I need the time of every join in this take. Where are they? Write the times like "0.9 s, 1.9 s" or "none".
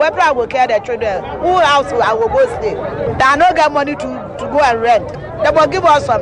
5.2 s